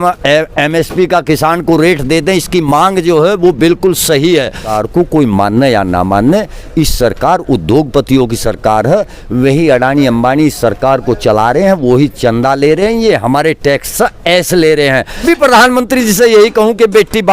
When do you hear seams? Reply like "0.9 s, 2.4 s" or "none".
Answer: 4.7 s, 15.2 s